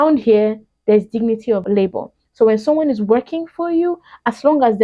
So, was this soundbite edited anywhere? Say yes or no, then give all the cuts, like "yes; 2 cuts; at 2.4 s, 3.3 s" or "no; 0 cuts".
yes; 1 cut; at 1.6 s